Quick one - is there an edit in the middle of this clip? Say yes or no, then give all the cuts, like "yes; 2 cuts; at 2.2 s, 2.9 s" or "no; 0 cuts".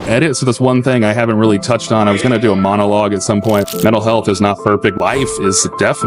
yes; 2 cuts; at 3.7 s, 5.0 s